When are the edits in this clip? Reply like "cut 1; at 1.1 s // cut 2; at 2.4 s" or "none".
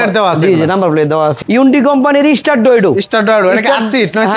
cut 1; at 1.5 s